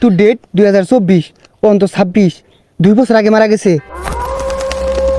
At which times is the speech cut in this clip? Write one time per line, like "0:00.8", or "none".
0:03.8

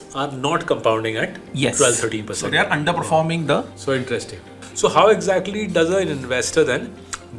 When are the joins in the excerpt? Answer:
0:04.5

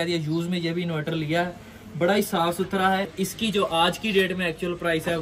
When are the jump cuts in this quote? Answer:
0:03.1

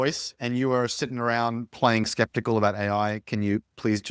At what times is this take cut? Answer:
none

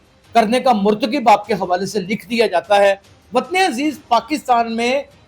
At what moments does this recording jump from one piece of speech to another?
0:03.1

